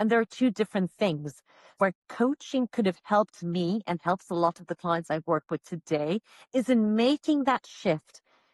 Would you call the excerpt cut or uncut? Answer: cut